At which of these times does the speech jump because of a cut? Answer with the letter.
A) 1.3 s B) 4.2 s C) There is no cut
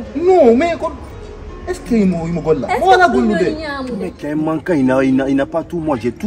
B